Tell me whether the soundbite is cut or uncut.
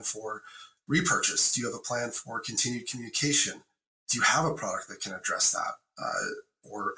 uncut